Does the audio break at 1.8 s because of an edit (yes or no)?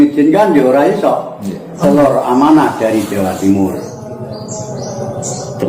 yes